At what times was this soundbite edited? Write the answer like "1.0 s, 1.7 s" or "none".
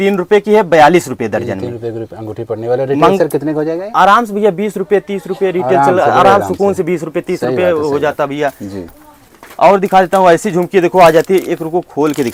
none